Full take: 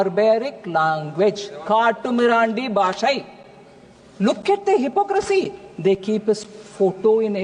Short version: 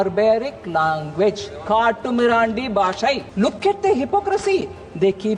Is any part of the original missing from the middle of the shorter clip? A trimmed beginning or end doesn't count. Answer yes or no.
yes